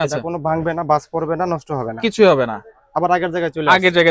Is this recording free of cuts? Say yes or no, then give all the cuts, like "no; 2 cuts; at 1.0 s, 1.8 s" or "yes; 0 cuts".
yes; 0 cuts